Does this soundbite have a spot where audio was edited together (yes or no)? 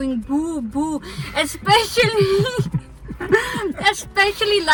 no